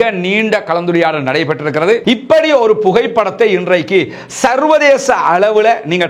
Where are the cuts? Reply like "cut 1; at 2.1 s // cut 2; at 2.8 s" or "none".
cut 1; at 2.0 s

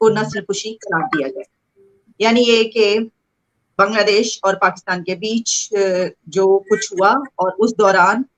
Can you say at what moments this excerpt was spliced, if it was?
none

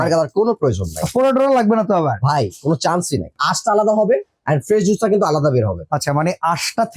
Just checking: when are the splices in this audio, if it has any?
cut 1; at 3.4 s

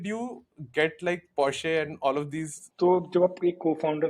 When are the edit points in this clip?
cut 1; at 2.6 s

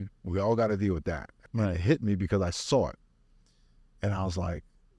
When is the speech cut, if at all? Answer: cut 1; at 1.3 s

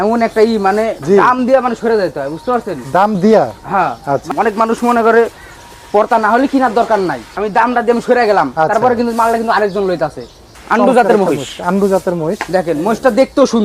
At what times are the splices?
cut 1; at 4.3 s // cut 2; at 7.2 s // cut 3; at 10.6 s

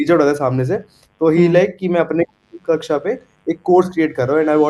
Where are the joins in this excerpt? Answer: none

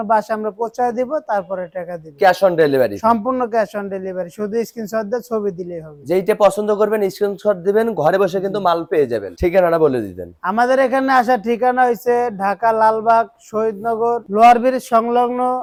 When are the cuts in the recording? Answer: none

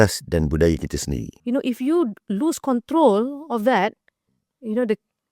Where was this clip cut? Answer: cut 1; at 1.3 s

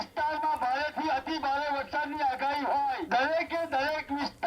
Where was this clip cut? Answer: cut 1; at 3.0 s

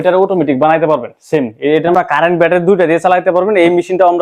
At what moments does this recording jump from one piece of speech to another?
cut 1; at 1.9 s

